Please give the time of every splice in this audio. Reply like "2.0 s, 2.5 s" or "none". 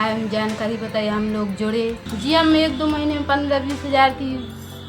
2.1 s